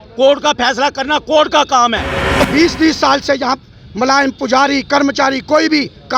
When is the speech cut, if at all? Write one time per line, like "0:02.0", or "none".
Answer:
0:02.4